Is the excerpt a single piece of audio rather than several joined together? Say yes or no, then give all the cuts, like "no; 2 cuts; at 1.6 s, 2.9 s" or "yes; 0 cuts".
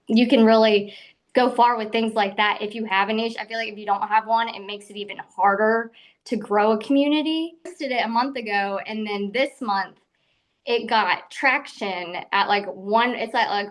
no; 1 cut; at 7.8 s